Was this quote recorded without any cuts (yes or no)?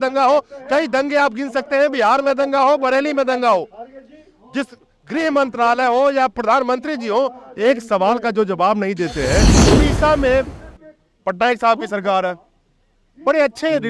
no